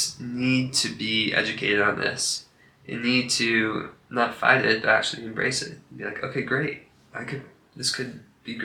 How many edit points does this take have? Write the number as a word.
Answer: zero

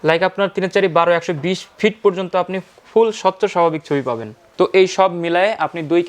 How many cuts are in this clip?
one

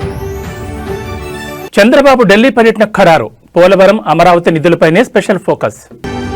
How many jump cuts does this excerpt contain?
zero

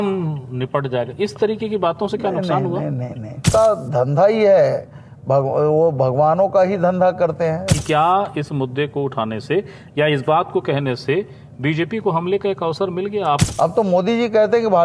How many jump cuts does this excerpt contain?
three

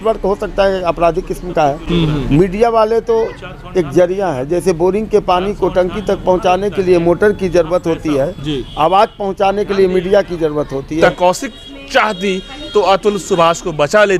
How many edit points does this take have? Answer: two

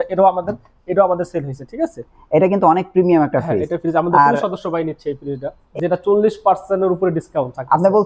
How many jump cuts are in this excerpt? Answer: one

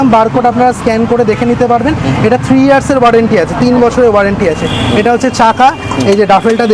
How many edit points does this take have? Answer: zero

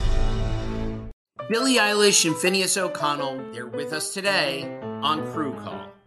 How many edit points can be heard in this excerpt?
one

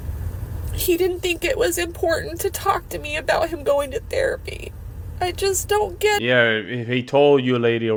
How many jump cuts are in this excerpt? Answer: zero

